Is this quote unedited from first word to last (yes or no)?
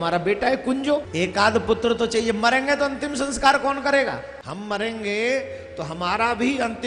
no